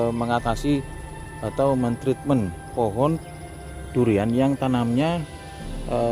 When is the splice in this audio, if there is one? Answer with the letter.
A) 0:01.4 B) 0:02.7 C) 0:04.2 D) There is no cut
B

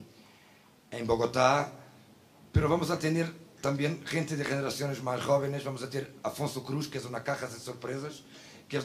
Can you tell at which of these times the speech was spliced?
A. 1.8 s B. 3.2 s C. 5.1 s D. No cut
B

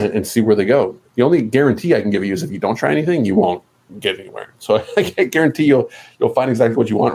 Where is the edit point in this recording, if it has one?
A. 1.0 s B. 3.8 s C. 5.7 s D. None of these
A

